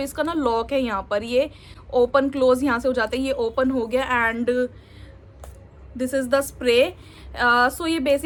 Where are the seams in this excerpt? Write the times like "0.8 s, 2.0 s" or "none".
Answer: none